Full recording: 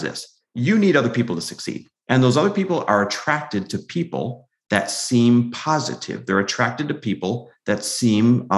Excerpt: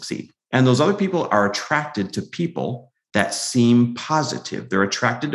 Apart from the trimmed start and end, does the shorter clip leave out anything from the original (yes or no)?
no